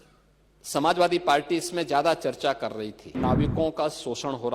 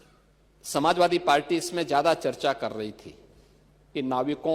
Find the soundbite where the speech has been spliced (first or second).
first